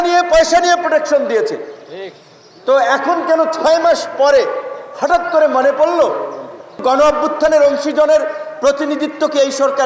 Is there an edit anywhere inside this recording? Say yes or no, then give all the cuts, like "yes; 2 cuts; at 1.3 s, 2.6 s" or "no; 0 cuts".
yes; 1 cut; at 6.8 s